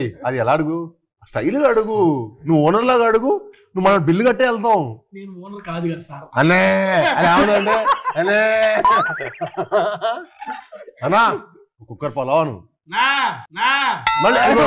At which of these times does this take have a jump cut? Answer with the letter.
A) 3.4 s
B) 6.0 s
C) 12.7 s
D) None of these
D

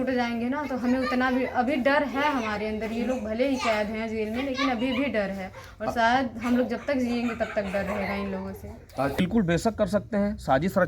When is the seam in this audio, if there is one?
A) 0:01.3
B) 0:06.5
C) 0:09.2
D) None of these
C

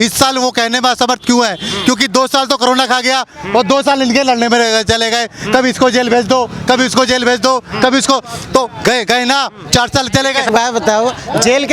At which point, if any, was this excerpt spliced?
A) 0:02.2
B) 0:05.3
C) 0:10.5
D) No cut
C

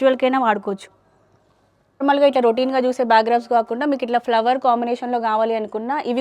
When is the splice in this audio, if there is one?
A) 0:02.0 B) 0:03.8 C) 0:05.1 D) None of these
A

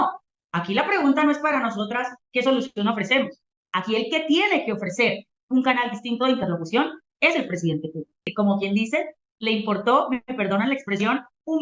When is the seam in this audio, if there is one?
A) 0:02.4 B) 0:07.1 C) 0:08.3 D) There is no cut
C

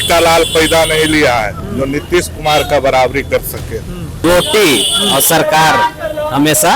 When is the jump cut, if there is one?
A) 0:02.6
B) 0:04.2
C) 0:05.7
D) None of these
B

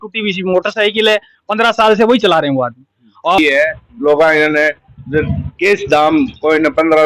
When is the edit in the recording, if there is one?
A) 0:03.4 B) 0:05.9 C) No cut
A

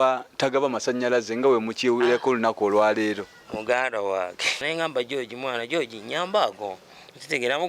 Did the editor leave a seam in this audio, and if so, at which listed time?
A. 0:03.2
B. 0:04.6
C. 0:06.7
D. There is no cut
B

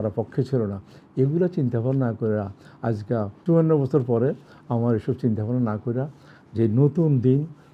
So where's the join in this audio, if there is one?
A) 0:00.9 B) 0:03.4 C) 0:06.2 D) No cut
B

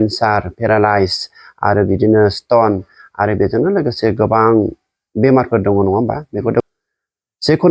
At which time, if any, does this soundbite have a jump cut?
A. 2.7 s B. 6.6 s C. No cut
B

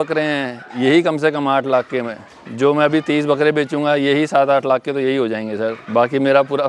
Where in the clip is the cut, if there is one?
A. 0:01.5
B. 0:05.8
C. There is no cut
C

